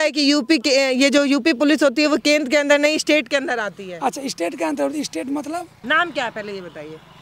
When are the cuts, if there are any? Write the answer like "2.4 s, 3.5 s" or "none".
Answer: 5.7 s